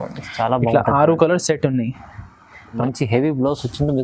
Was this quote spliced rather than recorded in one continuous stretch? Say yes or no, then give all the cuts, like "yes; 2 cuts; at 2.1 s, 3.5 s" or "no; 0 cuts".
yes; 1 cut; at 2.8 s